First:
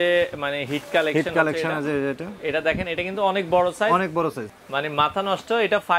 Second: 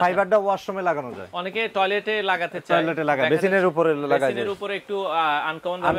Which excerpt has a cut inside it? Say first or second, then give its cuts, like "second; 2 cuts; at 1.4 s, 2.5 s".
first; 1 cut; at 4.5 s